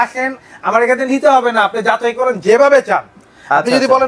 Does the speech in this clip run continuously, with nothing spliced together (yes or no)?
yes